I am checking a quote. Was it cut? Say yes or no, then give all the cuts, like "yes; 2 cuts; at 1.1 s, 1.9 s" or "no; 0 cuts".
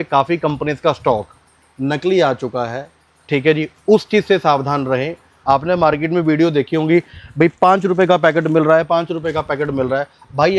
yes; 1 cut; at 5.2 s